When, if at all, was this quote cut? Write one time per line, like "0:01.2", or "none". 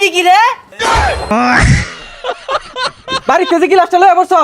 0:01.0
0:03.1